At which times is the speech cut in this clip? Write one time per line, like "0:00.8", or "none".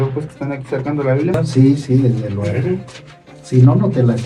0:01.4